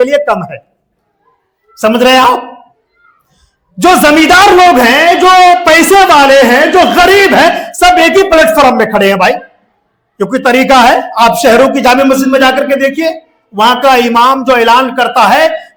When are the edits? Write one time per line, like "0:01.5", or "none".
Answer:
none